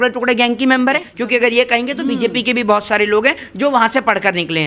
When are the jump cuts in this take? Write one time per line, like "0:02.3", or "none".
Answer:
0:01.1